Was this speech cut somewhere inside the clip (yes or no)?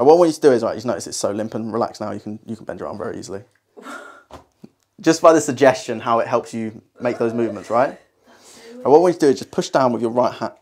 no